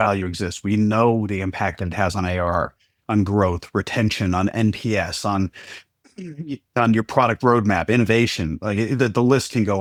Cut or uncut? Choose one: uncut